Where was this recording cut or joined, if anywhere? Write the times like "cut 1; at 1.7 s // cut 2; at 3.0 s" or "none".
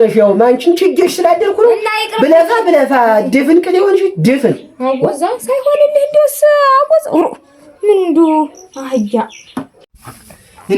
cut 1; at 9.8 s